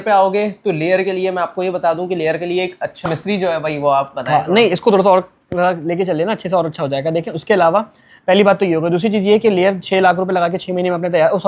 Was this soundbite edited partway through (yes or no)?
yes